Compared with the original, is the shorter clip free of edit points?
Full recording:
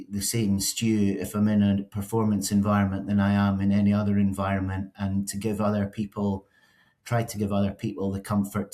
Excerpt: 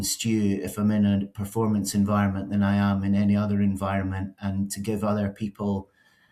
yes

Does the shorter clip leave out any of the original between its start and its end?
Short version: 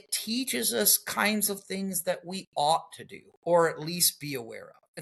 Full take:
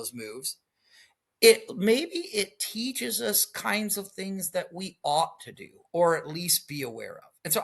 no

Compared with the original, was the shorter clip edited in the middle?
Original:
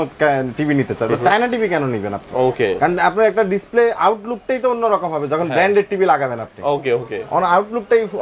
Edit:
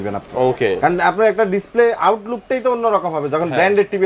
no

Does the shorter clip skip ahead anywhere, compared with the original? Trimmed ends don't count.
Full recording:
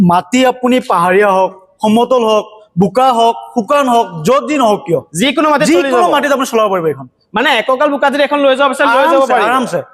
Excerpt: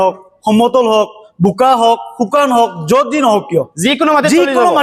no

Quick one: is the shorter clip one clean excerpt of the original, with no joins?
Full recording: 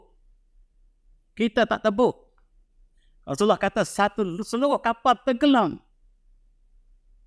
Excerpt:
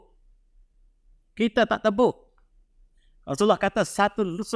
yes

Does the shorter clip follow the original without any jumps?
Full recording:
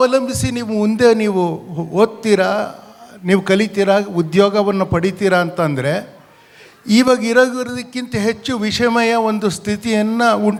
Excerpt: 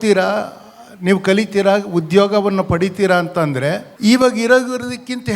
no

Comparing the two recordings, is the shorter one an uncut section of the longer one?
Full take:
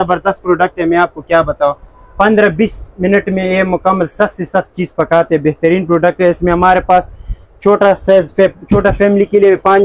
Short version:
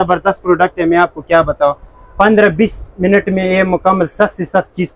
yes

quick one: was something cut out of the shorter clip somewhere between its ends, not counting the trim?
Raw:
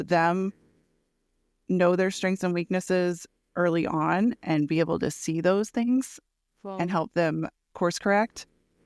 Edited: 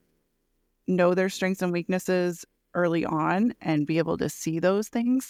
no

